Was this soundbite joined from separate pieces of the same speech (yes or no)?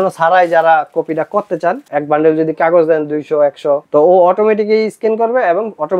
yes